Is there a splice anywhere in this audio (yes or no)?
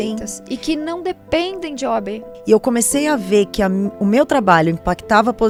no